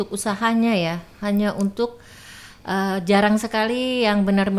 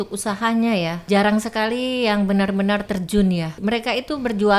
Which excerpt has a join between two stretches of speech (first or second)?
second